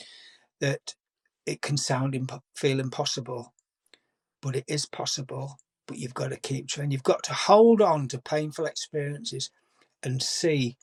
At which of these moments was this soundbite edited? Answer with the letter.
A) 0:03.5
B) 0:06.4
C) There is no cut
C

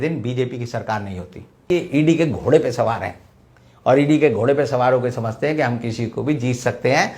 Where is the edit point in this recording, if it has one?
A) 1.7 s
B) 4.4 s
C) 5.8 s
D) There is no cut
A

